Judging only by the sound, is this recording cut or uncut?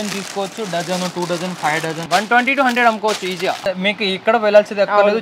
cut